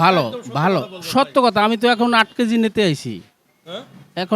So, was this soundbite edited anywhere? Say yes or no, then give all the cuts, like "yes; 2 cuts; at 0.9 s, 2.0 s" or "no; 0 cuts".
no; 0 cuts